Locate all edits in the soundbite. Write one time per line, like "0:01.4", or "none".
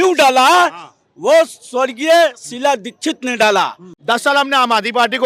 0:03.9